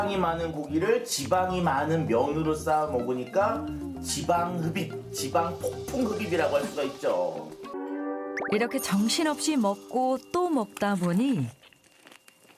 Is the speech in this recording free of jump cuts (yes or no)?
no